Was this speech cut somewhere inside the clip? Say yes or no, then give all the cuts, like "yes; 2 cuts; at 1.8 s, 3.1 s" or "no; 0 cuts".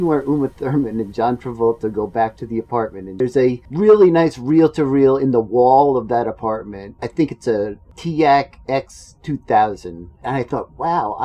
yes; 4 cuts; at 3.4 s, 6.8 s, 7.9 s, 10.1 s